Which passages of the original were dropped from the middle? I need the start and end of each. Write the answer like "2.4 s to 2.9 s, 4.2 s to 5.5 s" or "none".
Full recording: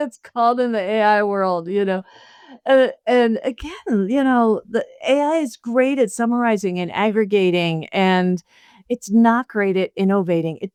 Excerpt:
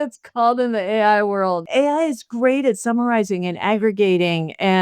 1.6 s to 5.0 s